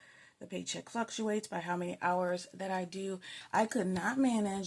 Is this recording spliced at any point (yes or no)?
yes